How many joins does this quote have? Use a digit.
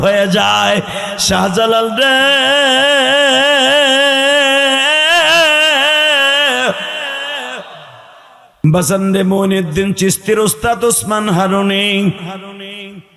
1